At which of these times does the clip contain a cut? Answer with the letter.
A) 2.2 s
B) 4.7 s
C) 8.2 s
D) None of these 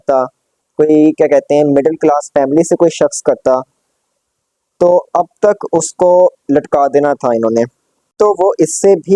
C